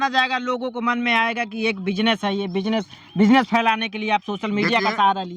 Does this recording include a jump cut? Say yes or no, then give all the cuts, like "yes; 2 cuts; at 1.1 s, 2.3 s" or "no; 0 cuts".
no; 0 cuts